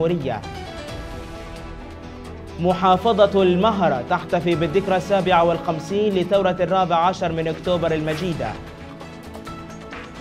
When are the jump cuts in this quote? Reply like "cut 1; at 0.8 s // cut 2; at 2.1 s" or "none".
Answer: none